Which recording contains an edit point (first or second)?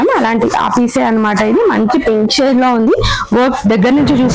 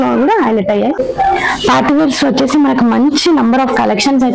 second